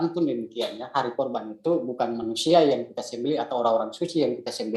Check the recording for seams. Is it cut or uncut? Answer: uncut